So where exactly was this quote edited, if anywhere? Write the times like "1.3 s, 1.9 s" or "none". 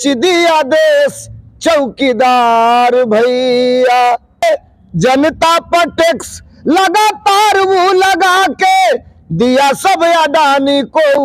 4.4 s